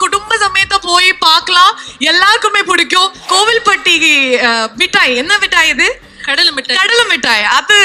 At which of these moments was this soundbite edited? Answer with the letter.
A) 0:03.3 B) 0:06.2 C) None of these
A